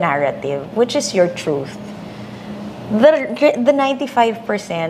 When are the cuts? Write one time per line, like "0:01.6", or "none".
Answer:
none